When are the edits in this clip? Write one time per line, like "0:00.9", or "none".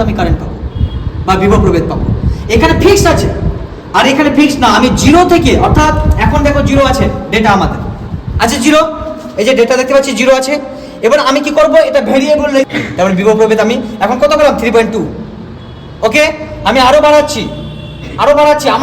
0:12.7